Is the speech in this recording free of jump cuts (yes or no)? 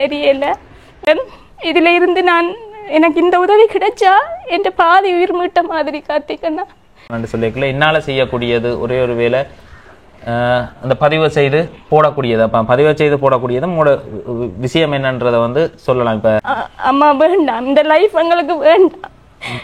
no